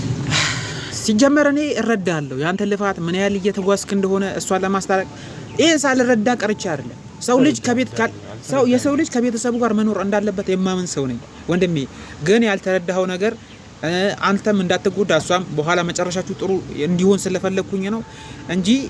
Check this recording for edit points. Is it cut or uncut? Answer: uncut